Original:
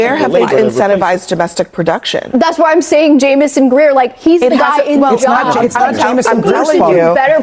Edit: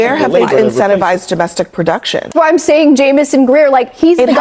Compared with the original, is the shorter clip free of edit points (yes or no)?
no